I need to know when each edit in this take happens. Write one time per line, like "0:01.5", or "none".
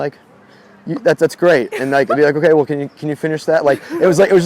none